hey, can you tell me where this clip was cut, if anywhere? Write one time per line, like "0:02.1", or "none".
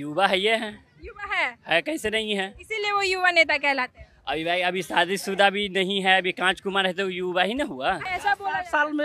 0:08.1